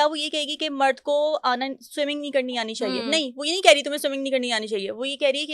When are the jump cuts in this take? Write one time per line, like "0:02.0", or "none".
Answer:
none